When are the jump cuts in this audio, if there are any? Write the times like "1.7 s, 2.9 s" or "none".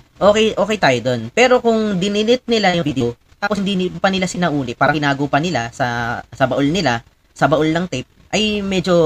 none